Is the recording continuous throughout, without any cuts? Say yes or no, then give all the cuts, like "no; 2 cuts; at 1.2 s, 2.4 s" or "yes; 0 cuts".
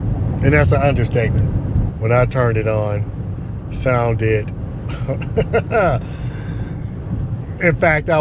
no; 1 cut; at 1.5 s